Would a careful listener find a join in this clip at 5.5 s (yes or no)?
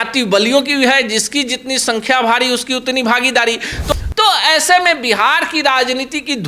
no